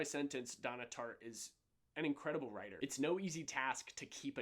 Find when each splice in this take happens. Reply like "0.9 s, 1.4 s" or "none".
2.7 s